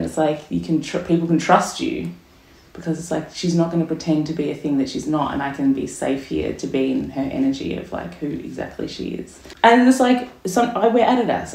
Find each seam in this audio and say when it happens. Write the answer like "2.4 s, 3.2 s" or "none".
9.4 s